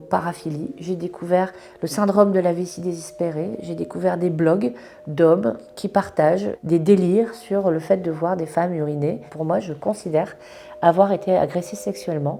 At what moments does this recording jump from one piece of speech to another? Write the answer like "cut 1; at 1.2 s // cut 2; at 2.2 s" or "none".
none